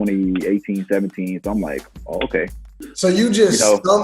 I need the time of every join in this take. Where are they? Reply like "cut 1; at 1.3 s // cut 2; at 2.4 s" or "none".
cut 1; at 2.8 s